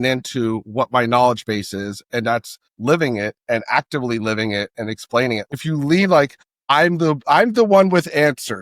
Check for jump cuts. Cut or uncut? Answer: cut